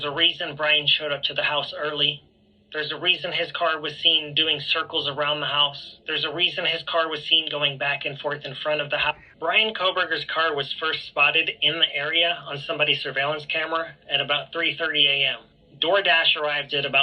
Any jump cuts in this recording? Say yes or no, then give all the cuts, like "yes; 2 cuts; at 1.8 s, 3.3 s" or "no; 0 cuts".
yes; 1 cut; at 9.2 s